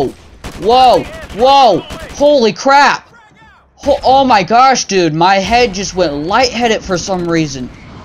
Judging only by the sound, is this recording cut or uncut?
uncut